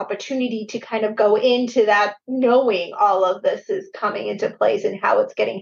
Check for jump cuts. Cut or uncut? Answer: uncut